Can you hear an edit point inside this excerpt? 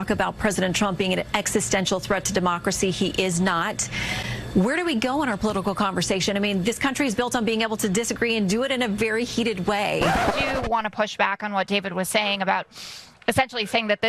yes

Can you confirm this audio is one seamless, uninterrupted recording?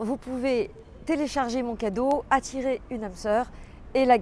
yes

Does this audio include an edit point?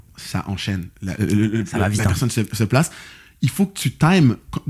no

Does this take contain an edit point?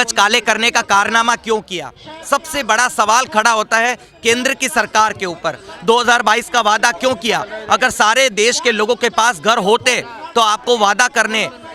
no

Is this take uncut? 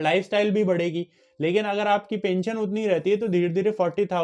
yes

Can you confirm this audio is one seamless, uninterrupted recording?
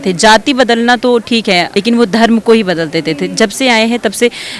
no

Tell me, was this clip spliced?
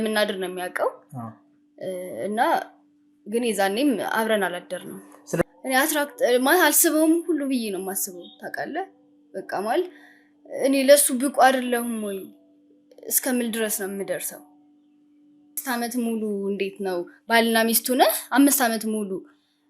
yes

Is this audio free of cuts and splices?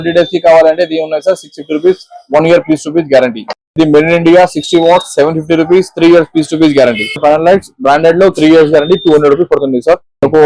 no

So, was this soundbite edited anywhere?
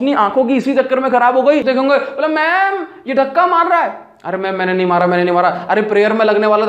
yes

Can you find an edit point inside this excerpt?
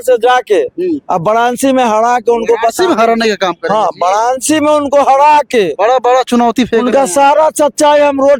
no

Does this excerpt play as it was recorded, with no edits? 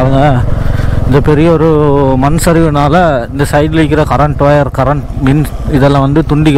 yes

